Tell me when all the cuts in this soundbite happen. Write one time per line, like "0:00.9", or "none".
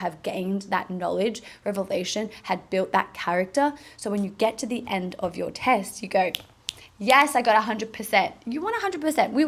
none